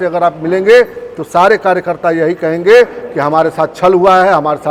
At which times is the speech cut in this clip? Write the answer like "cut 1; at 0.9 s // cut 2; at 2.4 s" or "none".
none